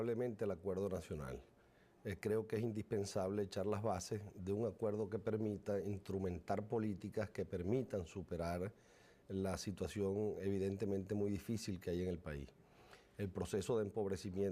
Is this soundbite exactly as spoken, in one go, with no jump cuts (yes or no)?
no